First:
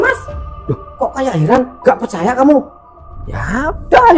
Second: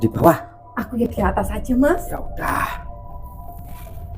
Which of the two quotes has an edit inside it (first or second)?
second